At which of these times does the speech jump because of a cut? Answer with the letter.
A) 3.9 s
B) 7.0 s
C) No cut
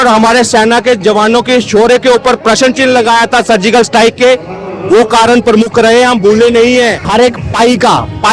B